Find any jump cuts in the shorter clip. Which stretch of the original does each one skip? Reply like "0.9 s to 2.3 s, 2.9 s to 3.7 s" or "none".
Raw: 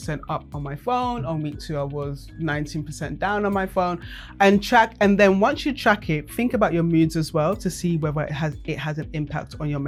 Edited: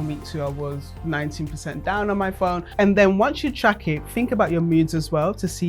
4.1 s to 4.9 s